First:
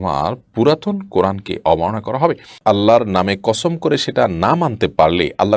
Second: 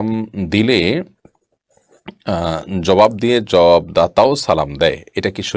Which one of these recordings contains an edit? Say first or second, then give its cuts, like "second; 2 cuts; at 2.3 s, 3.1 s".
first; 1 cut; at 2.5 s